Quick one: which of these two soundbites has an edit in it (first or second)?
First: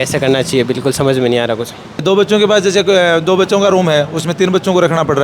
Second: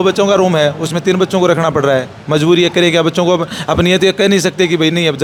first